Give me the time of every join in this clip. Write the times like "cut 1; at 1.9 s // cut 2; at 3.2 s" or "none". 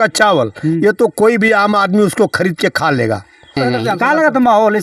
cut 1; at 3.6 s